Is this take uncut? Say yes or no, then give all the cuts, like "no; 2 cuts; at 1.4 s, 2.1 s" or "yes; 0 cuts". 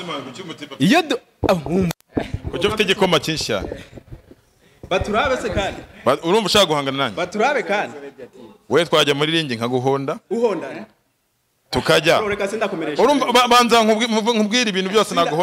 yes; 0 cuts